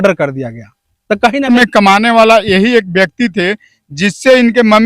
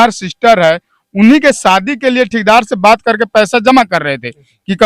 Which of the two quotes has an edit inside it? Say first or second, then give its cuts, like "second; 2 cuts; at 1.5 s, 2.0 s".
first; 1 cut; at 1.5 s